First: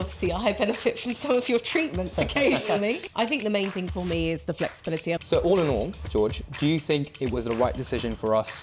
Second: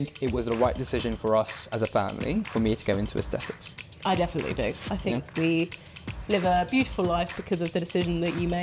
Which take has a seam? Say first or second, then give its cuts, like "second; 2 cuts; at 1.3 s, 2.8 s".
first; 2 cuts; at 3.1 s, 5.2 s